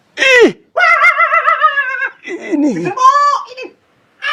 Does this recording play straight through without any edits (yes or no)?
yes